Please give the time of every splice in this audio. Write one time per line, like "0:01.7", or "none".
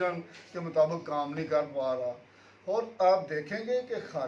none